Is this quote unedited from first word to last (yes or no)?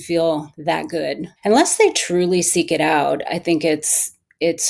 no